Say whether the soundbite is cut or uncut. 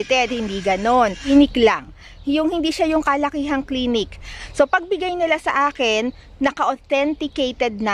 cut